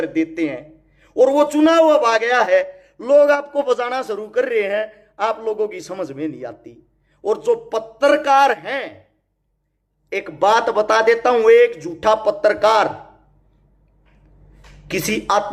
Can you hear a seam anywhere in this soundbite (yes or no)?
no